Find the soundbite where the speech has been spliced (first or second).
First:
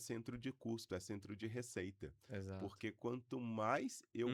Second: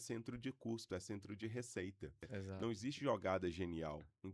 second